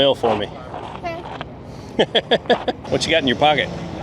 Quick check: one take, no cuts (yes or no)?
no